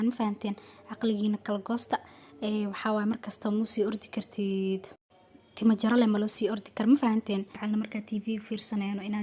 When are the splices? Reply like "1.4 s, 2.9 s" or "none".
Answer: 7.5 s

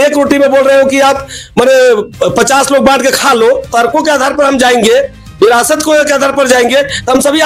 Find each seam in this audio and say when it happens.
3.7 s

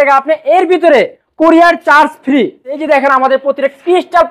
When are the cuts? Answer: 2.8 s

